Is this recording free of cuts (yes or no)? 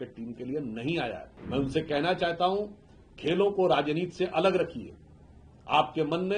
no